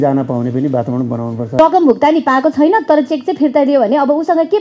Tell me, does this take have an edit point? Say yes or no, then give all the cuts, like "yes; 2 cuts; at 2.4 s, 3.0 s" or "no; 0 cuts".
yes; 1 cut; at 1.6 s